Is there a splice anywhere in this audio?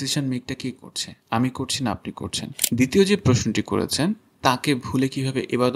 yes; 1 cut; at 2.5 s

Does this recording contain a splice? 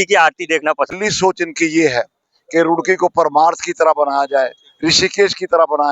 yes; 1 cut; at 0.9 s

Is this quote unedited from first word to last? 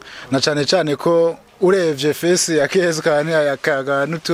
yes; 0 cuts

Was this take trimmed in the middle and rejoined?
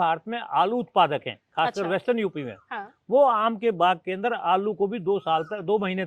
no; 0 cuts

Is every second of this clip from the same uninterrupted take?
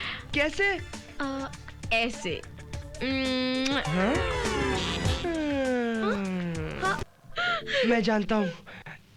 no; 1 cut; at 7.1 s

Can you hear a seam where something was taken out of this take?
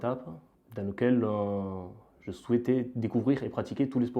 no; 0 cuts

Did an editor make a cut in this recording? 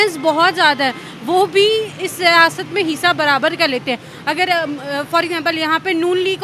no; 0 cuts

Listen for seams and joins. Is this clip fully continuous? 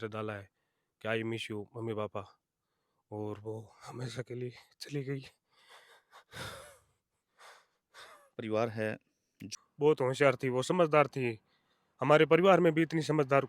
no; 1 cut; at 9.4 s

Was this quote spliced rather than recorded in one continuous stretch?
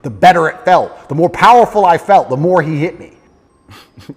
yes; 1 cut; at 3.1 s

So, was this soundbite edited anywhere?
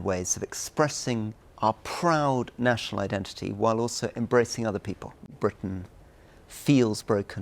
yes; 2 cuts; at 1.4 s, 5.3 s

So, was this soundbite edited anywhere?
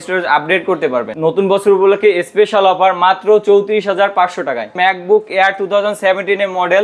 yes; 2 cuts; at 1.1 s, 4.7 s

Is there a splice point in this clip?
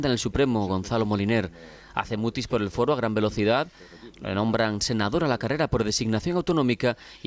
yes; 1 cut; at 2.5 s

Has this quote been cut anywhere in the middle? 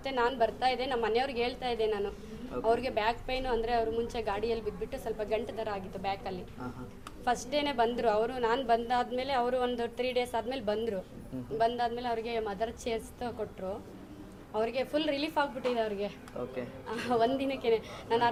no; 0 cuts

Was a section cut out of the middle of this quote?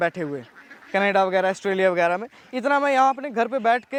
no; 0 cuts

